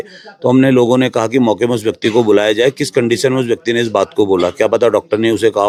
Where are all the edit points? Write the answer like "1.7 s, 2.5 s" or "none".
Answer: none